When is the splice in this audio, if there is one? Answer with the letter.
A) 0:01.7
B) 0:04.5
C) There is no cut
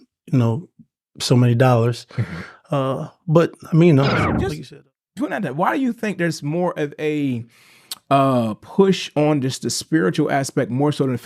B